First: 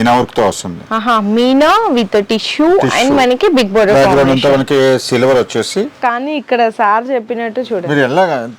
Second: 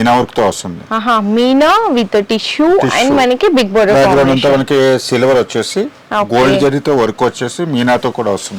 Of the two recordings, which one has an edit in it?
first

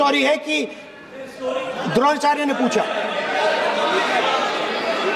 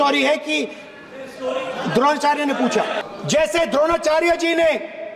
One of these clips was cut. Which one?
second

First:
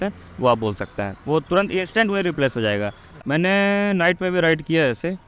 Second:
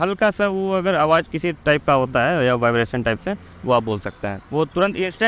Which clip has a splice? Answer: first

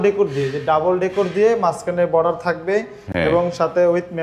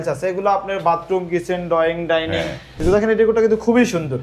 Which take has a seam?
second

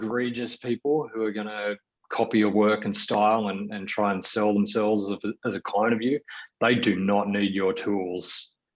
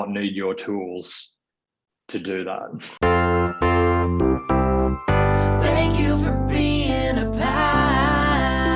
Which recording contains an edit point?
second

